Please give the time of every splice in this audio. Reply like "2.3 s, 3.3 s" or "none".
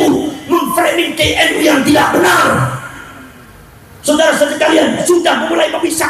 none